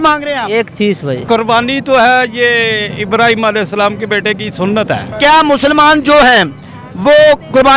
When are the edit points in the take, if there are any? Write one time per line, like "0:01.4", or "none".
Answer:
0:01.2
0:05.1